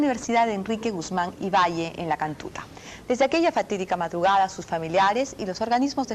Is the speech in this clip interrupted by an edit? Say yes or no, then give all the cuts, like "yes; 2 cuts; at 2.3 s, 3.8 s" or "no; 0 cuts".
yes; 1 cut; at 2.2 s